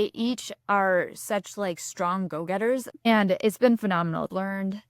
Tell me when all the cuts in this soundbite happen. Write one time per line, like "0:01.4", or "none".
0:03.0